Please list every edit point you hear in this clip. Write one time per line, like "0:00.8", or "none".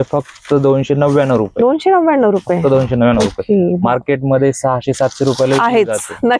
none